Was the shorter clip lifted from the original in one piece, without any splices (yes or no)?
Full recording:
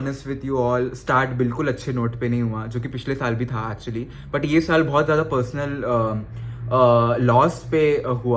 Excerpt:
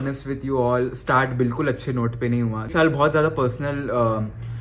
no